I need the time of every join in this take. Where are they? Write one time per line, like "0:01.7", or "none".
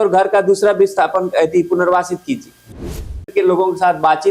0:03.0